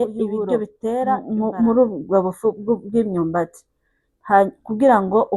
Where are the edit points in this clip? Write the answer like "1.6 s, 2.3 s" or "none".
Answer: 1.2 s